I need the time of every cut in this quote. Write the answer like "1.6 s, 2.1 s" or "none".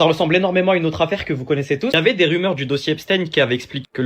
1.9 s